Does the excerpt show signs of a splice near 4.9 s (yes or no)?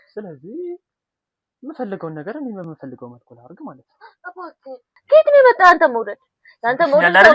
yes